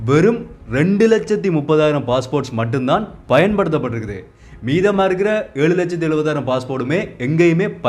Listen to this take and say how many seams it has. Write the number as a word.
zero